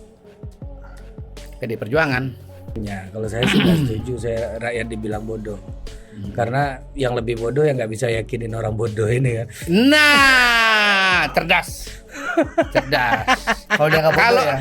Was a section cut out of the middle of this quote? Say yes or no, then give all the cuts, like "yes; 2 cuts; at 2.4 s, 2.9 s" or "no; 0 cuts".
yes; 1 cut; at 2.8 s